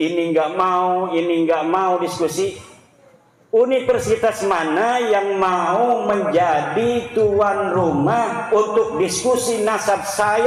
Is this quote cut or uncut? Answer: uncut